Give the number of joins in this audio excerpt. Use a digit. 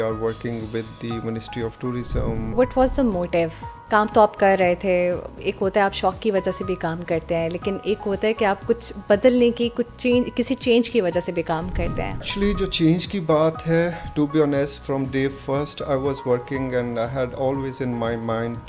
2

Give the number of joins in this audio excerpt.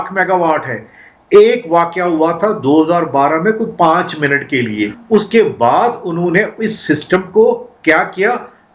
1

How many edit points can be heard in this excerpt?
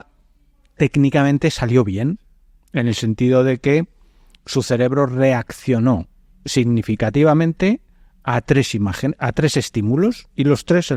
0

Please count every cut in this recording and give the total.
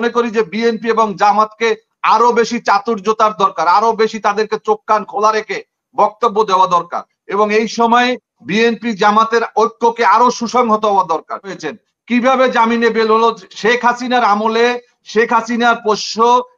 1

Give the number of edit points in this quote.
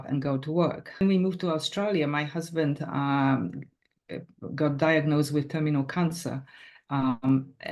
1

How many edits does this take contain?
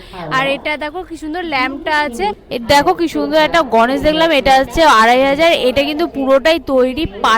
1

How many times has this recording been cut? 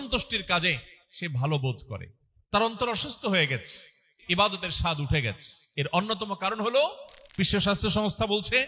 2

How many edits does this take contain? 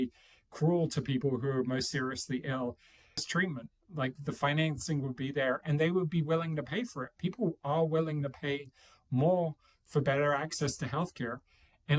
1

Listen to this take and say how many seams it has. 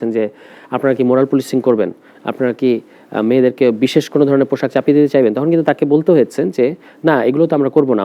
0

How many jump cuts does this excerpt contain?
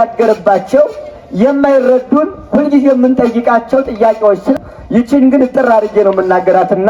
1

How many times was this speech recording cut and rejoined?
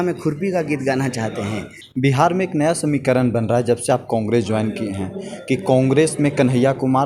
1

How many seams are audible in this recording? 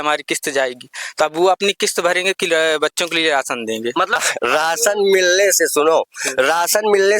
1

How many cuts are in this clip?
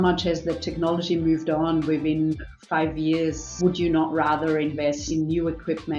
2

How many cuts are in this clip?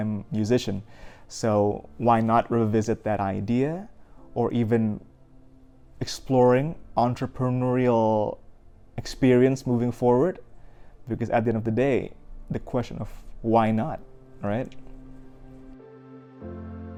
0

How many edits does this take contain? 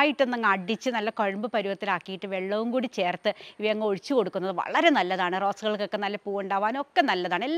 0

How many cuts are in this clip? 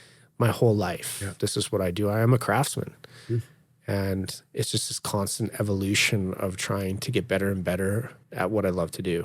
2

